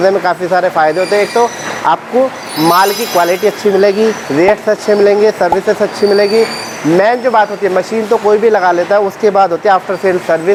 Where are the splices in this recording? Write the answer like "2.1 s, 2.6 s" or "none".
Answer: none